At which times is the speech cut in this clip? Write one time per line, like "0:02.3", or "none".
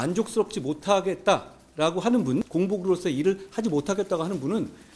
0:02.5